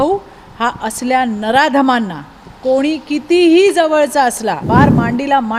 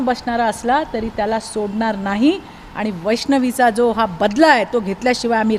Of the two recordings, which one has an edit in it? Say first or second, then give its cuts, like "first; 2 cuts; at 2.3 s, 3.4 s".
first; 1 cut; at 4.6 s